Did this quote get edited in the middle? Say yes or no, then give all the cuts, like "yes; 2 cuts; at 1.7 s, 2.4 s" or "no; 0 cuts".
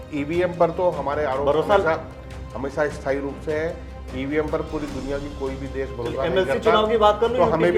no; 0 cuts